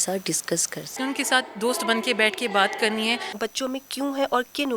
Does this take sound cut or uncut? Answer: cut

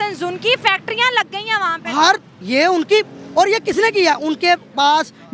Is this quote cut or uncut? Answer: cut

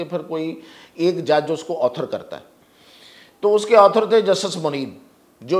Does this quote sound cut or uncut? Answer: uncut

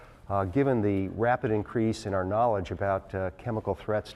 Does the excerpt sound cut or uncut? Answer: cut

